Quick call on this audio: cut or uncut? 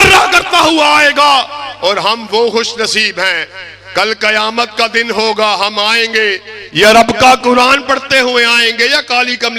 uncut